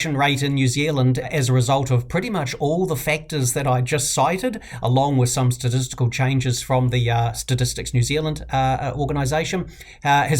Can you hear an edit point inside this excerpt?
yes; 2 cuts; at 1.3 s, 7.3 s

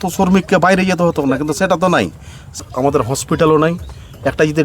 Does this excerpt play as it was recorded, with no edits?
no; 1 cut; at 2.6 s

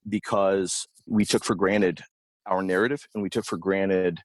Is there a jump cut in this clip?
yes; 1 cut; at 1.1 s

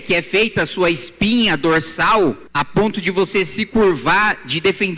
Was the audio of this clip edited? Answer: yes; 1 cut; at 2.4 s

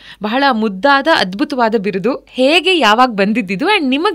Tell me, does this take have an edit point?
no; 0 cuts

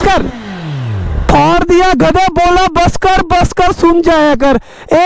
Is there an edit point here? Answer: no; 0 cuts

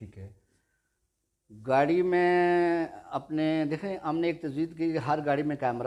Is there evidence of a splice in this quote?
no; 0 cuts

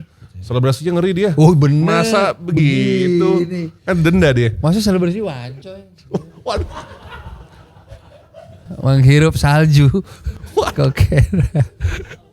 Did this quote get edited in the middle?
no; 0 cuts

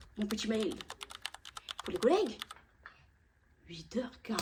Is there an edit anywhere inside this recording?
no; 0 cuts

